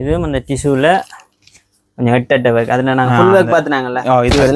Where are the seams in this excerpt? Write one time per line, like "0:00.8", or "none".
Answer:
none